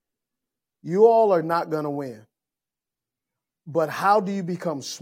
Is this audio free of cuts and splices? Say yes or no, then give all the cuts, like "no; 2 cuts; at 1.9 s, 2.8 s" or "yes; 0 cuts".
yes; 0 cuts